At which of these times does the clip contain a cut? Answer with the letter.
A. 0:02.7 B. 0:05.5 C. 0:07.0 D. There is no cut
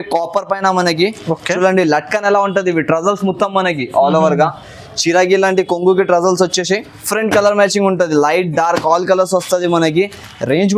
C